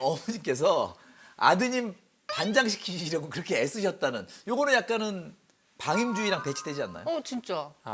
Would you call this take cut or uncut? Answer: uncut